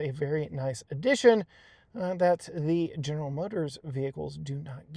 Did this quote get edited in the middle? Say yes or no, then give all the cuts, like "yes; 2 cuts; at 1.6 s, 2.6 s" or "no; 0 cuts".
no; 0 cuts